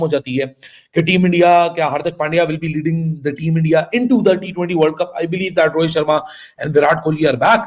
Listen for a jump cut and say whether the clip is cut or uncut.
uncut